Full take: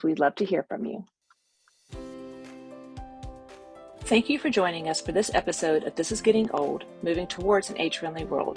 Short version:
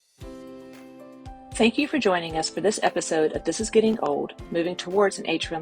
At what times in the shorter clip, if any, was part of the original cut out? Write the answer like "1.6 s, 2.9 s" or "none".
1.6 s